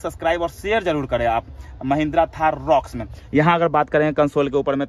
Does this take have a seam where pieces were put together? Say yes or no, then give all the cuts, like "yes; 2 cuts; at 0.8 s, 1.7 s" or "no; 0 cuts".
no; 0 cuts